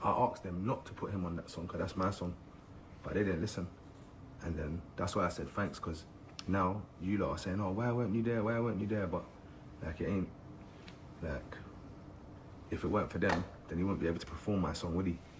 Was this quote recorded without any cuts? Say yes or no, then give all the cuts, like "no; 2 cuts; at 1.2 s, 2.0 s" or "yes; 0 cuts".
yes; 0 cuts